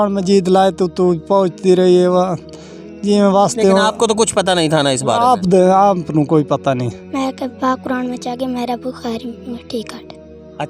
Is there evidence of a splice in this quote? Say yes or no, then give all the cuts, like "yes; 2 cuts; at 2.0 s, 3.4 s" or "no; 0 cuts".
yes; 1 cut; at 7.0 s